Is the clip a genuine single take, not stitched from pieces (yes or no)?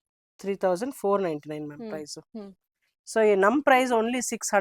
yes